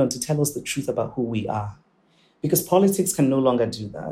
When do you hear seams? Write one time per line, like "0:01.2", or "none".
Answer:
none